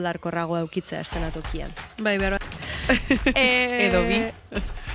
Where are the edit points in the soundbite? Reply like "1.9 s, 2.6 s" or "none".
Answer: 2.4 s